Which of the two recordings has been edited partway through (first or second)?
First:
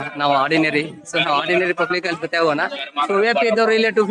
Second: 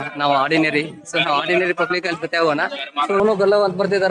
second